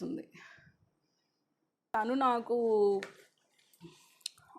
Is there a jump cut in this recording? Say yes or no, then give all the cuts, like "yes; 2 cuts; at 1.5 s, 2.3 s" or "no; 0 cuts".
yes; 1 cut; at 1.9 s